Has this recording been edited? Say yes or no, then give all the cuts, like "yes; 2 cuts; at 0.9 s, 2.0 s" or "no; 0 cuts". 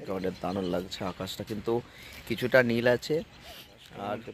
no; 0 cuts